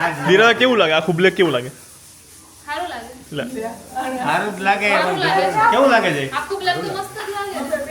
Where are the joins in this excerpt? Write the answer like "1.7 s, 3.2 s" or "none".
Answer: none